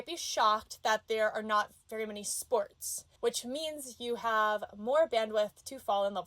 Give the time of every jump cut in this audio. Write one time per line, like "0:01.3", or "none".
0:03.0